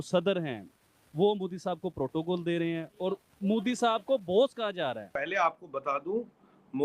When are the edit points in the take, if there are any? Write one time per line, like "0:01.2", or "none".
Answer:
0:05.1